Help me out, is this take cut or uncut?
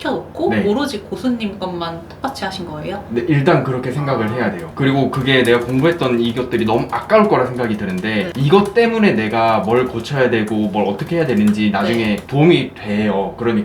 cut